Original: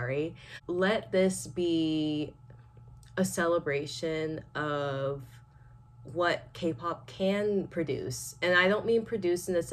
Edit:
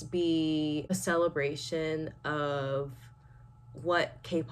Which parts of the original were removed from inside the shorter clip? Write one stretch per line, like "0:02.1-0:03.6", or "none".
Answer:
0:02.3-0:03.2

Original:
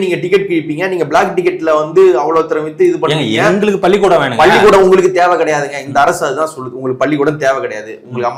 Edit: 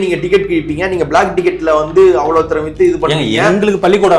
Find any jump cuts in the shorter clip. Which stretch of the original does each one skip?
none

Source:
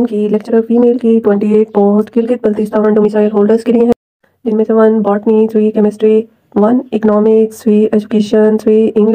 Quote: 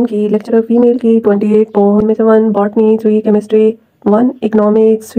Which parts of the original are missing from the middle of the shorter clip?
0:02.0-0:04.5

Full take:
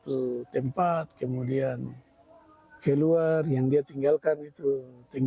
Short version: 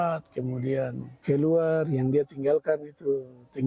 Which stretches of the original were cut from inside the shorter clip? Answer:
0:01.9-0:02.7

